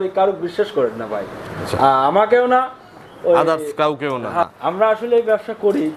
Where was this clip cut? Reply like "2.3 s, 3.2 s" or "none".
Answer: 4.4 s